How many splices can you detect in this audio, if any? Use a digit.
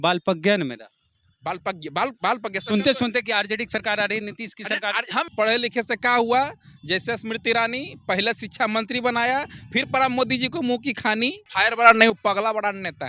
2